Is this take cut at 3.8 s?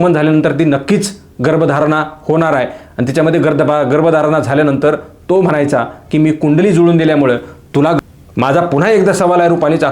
no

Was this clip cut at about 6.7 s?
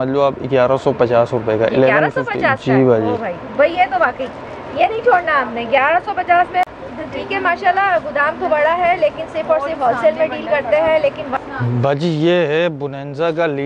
yes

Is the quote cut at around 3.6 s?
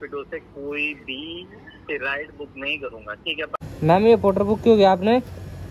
yes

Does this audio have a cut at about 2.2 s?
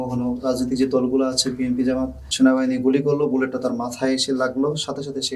yes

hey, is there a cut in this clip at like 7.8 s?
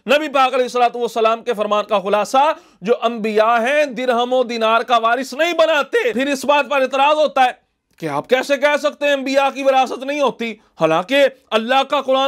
no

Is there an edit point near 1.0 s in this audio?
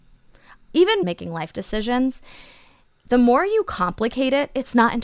yes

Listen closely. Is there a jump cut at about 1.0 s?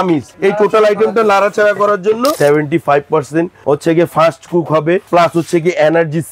no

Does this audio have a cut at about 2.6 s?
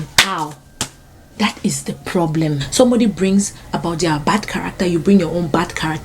yes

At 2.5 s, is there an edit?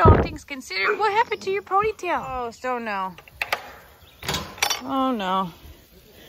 yes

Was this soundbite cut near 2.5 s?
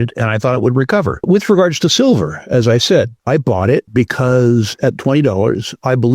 no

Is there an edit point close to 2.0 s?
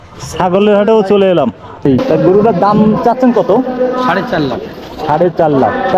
yes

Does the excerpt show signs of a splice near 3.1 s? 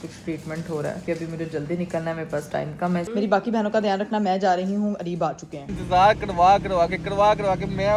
yes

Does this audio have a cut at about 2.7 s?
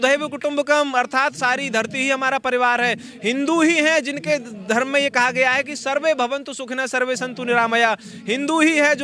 no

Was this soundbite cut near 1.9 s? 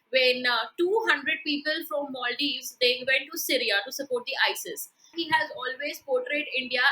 no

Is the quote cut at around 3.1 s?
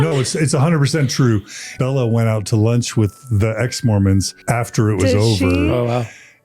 no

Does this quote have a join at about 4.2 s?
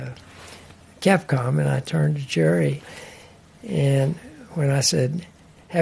no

